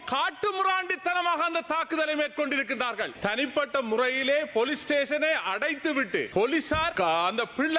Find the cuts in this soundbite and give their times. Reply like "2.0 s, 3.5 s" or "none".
3.1 s, 6.3 s, 6.9 s